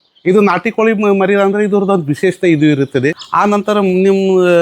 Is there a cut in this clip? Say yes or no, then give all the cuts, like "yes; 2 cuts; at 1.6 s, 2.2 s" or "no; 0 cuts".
yes; 1 cut; at 3.2 s